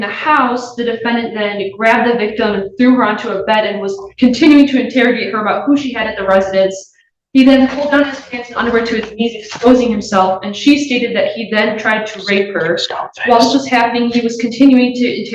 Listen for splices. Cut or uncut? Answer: uncut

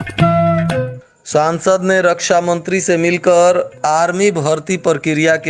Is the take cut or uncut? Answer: cut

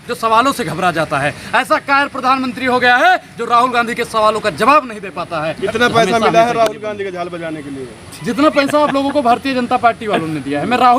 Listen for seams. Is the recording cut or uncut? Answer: cut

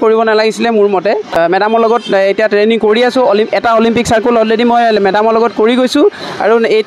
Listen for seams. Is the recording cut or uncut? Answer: cut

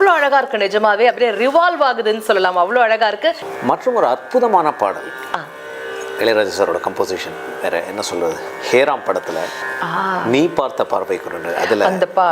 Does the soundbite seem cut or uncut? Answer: cut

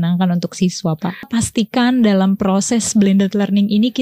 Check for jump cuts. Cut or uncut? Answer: cut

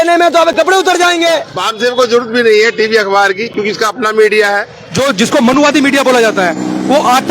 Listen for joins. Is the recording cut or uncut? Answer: cut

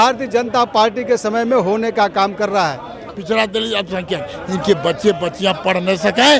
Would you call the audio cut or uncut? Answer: cut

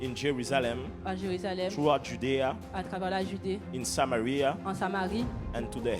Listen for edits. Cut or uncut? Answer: uncut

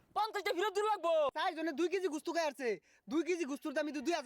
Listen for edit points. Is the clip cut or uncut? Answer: cut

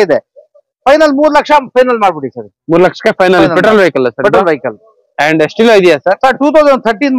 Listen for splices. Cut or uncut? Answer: uncut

